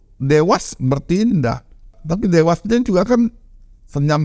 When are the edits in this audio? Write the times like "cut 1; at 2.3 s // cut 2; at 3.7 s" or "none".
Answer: cut 1; at 2.0 s